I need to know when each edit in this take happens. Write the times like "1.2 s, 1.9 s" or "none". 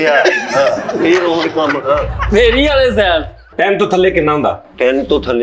3.5 s